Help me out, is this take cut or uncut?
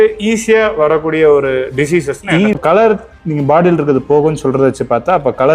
cut